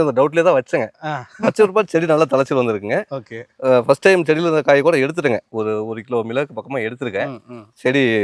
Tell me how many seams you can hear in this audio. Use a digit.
0